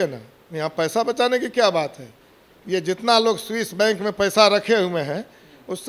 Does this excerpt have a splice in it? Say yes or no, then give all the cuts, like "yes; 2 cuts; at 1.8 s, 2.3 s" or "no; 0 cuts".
no; 0 cuts